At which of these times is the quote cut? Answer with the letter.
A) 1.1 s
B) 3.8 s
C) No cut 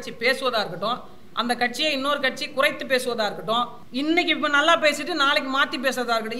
B